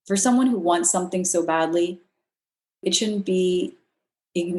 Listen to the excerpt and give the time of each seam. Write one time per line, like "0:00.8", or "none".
0:02.8